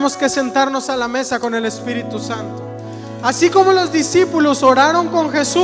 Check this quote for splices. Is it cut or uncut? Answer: uncut